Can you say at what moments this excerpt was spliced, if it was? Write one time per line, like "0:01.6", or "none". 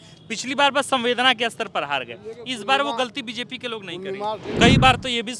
0:04.5